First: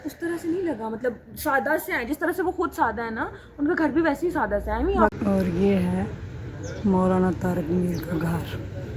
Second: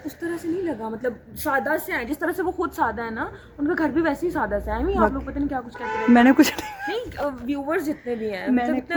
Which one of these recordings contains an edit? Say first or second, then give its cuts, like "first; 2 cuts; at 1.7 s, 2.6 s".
first; 1 cut; at 5.2 s